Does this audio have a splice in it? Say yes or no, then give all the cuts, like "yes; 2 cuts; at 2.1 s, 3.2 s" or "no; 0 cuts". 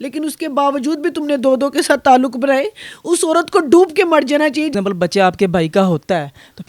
yes; 1 cut; at 4.7 s